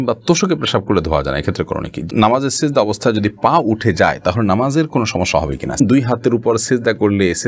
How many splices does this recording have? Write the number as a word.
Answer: two